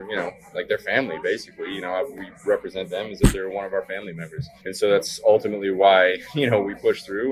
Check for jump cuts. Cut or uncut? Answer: uncut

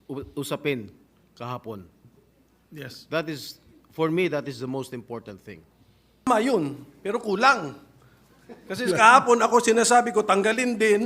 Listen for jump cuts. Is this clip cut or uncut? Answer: cut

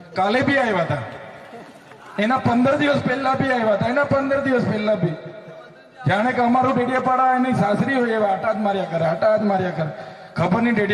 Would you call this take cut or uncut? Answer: uncut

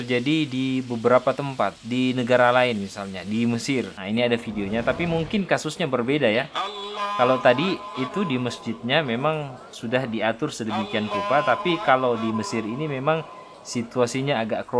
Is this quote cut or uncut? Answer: uncut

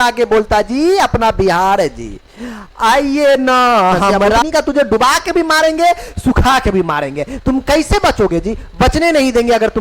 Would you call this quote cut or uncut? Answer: cut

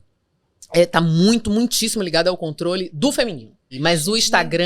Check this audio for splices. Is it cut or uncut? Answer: cut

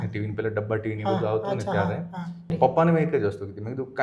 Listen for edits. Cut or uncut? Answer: cut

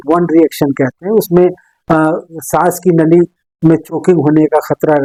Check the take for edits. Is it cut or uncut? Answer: uncut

